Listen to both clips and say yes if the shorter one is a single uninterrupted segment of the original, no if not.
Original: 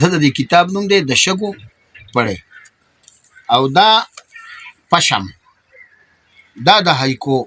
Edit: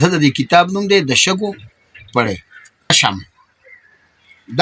no